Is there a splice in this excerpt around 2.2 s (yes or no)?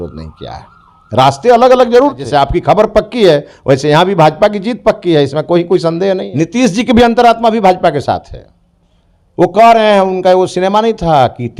yes